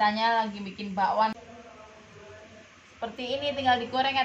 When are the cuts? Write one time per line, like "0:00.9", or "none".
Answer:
0:01.2